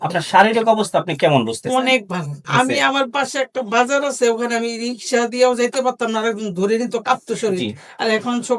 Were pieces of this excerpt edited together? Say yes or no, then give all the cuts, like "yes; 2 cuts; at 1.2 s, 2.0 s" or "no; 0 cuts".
yes; 1 cut; at 2.4 s